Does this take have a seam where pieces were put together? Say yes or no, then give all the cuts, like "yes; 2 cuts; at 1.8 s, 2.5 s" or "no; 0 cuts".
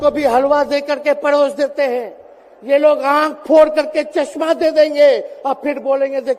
no; 0 cuts